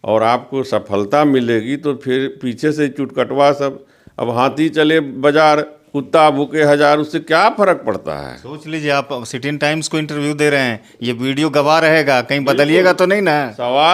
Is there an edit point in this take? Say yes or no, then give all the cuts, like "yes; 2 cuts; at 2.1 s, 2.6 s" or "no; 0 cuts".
no; 0 cuts